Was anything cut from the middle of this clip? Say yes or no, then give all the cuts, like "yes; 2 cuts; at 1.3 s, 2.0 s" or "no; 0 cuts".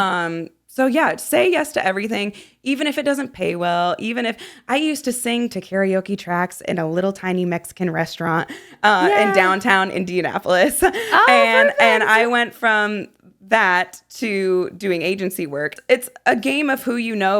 yes; 1 cut; at 15.7 s